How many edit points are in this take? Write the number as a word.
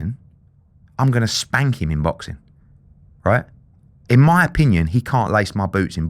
zero